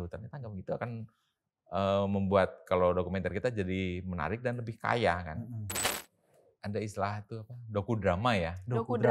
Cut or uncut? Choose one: cut